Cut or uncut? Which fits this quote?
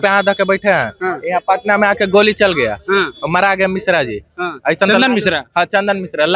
uncut